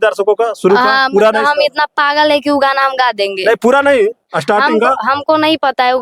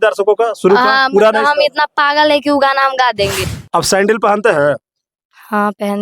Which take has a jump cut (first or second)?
second